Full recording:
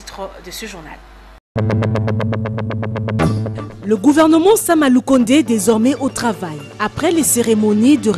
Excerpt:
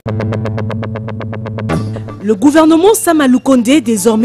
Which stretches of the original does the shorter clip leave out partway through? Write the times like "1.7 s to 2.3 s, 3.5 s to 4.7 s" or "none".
3.6 s to 3.7 s